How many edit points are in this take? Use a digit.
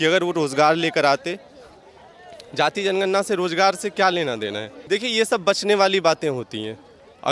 1